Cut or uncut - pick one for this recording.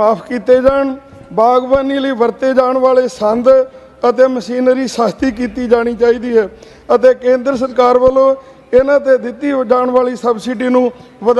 uncut